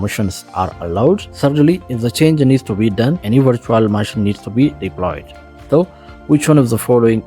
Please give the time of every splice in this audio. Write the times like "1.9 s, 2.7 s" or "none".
1.3 s, 3.2 s

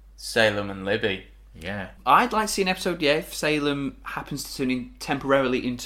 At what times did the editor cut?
1.9 s

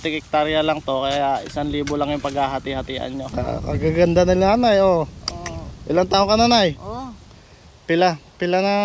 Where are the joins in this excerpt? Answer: 3.3 s

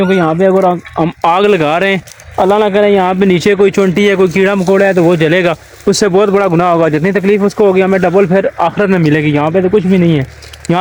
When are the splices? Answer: none

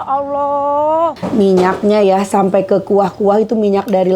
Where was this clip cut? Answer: 1.2 s

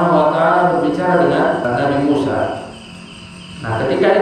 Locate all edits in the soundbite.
1.6 s

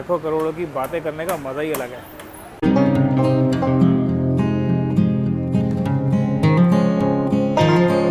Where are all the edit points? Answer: none

